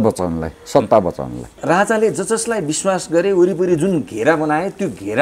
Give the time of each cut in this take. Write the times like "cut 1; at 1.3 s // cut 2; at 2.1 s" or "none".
cut 1; at 1.6 s